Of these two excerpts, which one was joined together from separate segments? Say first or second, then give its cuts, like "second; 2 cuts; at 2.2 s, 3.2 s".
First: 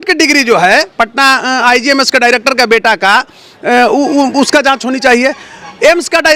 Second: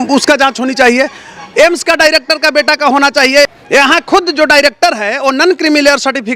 second; 1 cut; at 3.5 s